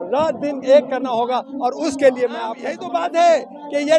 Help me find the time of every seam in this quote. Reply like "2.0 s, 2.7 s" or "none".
2.8 s